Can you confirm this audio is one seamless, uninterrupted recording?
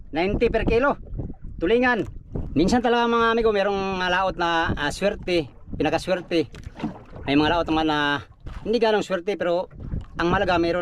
no; 1 cut; at 2.4 s

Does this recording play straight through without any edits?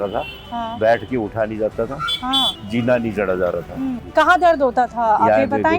no; 2 cuts; at 2.6 s, 4.0 s

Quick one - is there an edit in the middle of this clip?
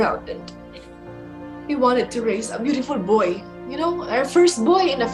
no; 0 cuts

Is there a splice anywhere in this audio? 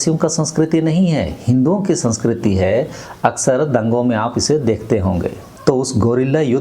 yes; 1 cut; at 5.5 s

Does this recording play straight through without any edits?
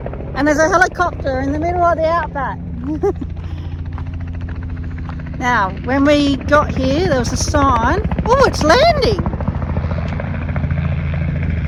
yes; 0 cuts

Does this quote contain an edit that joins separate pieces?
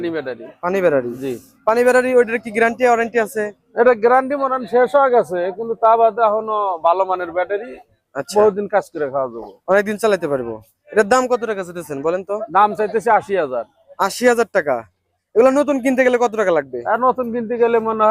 no; 0 cuts

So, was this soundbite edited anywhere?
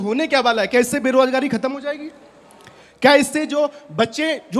no; 0 cuts

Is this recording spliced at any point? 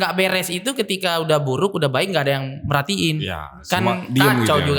no; 0 cuts

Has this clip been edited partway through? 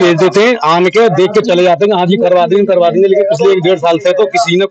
no; 0 cuts

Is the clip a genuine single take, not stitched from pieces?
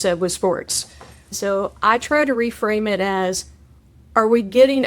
no; 1 cut; at 1.3 s

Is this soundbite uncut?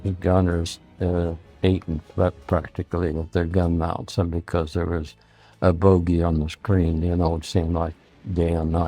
yes; 0 cuts

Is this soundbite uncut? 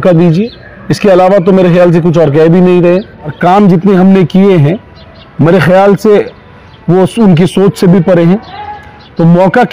no; 1 cut; at 3.2 s

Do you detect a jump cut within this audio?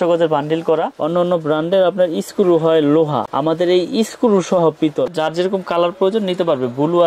yes; 2 cuts; at 0.9 s, 5.1 s

